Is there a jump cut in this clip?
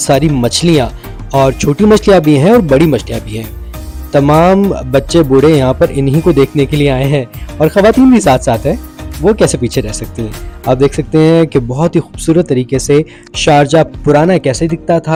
no; 0 cuts

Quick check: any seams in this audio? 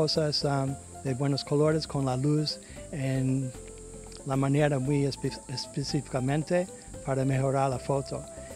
no; 0 cuts

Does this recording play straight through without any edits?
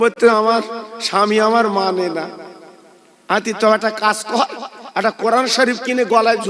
yes; 0 cuts

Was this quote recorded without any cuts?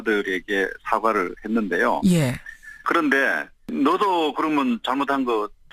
yes; 0 cuts

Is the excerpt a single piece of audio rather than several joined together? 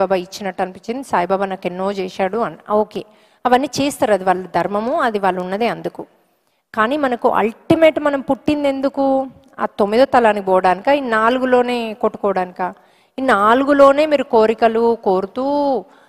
yes; 0 cuts

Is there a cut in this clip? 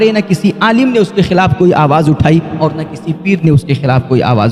no; 0 cuts

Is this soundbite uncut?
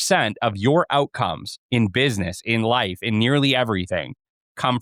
yes; 0 cuts

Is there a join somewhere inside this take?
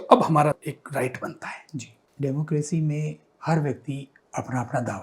yes; 1 cut; at 4.1 s

